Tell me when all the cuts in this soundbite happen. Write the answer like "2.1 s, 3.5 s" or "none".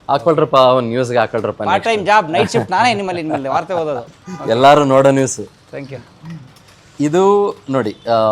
none